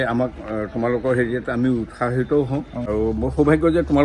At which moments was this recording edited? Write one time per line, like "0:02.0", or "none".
0:02.8